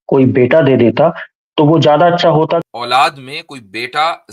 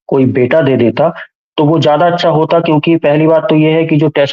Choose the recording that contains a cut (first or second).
first